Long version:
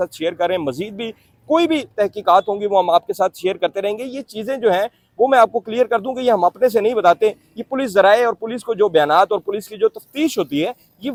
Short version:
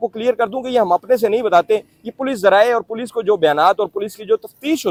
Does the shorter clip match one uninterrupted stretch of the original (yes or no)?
yes